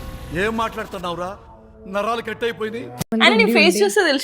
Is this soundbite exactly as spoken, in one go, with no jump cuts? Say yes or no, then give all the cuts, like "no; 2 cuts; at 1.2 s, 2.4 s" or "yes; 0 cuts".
no; 1 cut; at 3.1 s